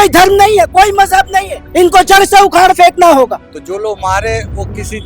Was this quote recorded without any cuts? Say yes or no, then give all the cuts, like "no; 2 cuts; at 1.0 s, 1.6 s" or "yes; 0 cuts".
no; 2 cuts; at 1.6 s, 3.5 s